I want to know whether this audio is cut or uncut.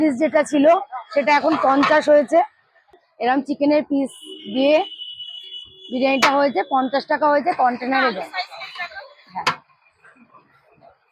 uncut